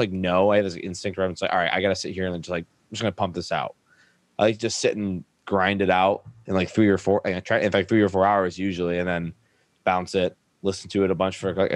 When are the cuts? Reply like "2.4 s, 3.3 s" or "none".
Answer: 6.3 s, 9.7 s